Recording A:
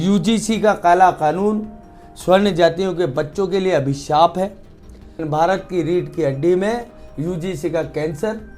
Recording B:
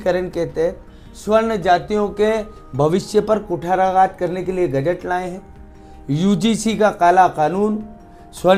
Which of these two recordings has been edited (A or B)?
A